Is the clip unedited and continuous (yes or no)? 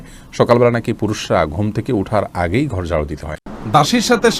no